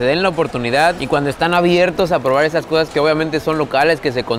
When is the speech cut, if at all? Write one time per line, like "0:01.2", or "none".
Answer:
0:01.0